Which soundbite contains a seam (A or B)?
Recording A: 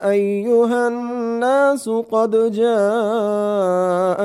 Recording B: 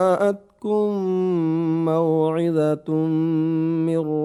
A